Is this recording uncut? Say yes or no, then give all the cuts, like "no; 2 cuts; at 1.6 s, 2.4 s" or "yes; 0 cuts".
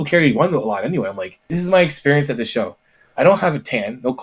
no; 1 cut; at 1.5 s